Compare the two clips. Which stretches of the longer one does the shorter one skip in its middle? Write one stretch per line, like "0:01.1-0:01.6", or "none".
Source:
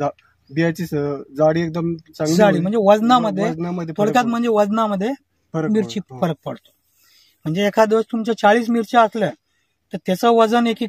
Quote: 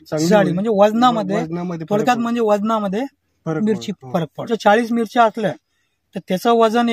0:06.5-0:08.2